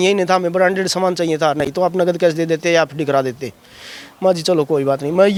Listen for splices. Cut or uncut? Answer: uncut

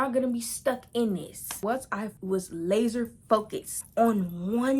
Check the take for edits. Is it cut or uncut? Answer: cut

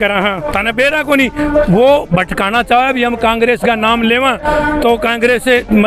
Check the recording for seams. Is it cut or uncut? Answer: uncut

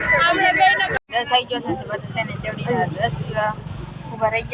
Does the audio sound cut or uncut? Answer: cut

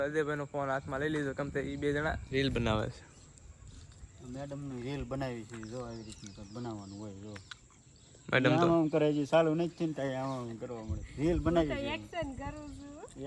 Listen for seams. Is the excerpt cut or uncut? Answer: uncut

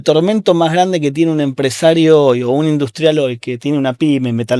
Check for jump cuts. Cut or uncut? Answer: uncut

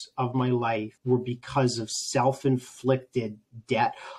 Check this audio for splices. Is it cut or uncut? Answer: cut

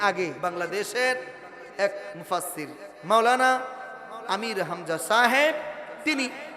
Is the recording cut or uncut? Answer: uncut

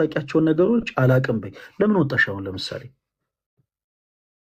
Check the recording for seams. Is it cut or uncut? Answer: uncut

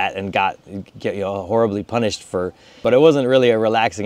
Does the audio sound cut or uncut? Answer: cut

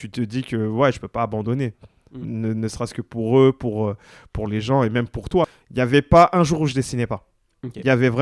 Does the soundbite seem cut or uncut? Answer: cut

